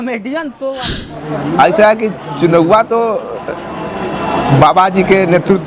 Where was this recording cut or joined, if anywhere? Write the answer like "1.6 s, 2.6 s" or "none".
1.0 s